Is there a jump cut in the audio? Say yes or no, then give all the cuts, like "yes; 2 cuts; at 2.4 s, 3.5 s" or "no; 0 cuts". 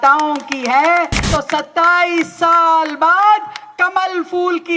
yes; 1 cut; at 1.2 s